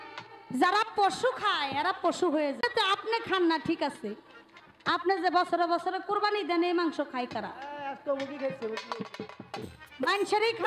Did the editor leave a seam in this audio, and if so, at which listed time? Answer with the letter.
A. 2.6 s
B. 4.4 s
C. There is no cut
A